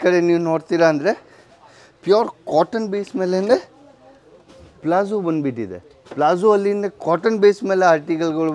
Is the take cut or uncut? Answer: uncut